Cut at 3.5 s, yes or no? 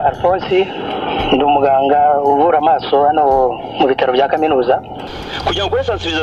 no